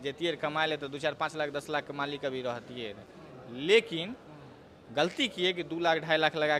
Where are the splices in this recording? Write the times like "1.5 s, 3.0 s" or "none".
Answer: none